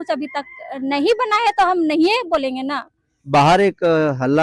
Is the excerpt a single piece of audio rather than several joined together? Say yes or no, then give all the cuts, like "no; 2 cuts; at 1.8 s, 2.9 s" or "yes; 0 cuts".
yes; 0 cuts